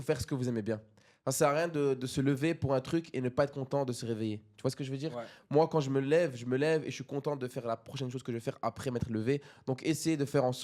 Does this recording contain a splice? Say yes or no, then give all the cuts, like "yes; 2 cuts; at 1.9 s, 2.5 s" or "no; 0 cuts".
no; 0 cuts